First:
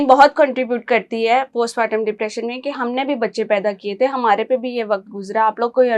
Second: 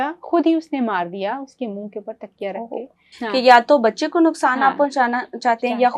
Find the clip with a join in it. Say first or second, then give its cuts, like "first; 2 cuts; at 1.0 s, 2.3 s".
second; 1 cut; at 3.1 s